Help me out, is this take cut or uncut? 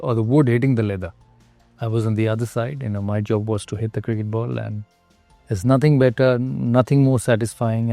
uncut